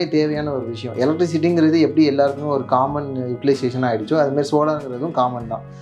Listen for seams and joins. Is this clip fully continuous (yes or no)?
yes